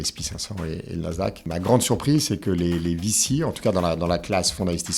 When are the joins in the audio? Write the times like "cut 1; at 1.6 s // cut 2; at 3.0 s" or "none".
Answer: cut 1; at 1.5 s